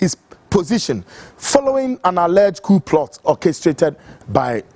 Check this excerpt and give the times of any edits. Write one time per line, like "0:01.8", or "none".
0:03.2